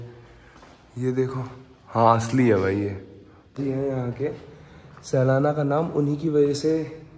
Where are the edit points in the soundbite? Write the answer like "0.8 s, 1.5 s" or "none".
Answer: 3.6 s

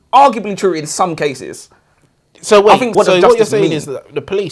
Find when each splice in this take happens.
2.9 s

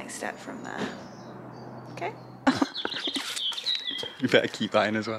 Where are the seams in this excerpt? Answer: 2.2 s

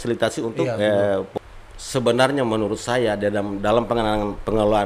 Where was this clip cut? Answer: 1.3 s

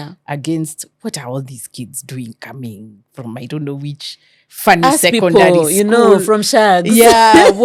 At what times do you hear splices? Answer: none

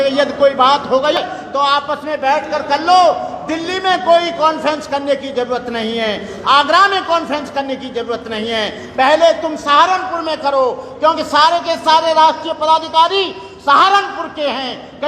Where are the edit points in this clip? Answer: 1.2 s

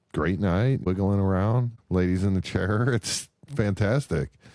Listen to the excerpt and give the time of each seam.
0.8 s, 1.7 s

